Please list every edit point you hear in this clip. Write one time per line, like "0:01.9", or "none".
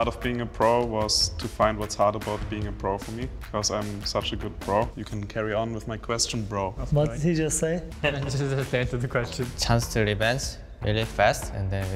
0:03.4
0:05.0
0:07.9
0:09.5